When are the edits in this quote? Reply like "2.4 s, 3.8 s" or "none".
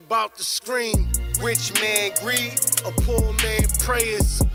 none